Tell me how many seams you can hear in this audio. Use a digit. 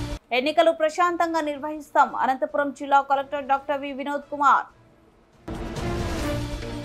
0